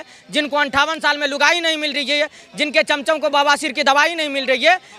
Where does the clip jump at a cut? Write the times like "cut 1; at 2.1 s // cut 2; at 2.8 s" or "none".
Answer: none